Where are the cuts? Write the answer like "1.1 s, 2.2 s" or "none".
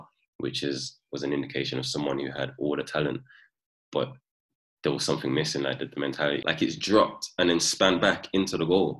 6.4 s